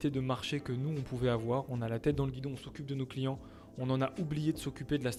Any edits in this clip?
no; 0 cuts

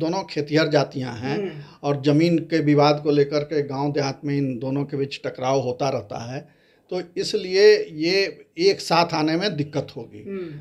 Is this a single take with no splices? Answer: yes; 0 cuts

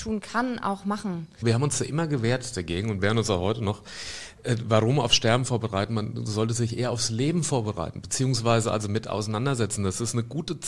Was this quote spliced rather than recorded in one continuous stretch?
yes; 1 cut; at 1.4 s

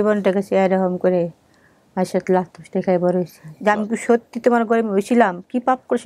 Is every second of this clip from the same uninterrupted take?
no; 1 cut; at 3.4 s

